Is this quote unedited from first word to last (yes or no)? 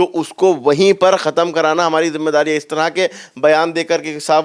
yes